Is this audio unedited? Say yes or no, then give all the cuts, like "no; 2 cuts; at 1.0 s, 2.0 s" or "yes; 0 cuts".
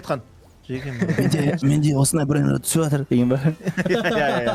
yes; 0 cuts